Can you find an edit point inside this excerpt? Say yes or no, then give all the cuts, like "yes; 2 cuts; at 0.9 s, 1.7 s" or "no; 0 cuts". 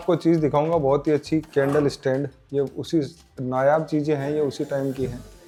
no; 0 cuts